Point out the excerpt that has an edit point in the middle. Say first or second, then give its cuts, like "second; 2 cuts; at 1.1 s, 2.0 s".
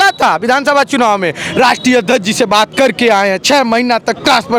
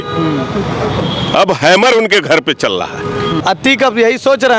second; 1 cut; at 3.4 s